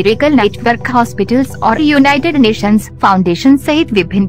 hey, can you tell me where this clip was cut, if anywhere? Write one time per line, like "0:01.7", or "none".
none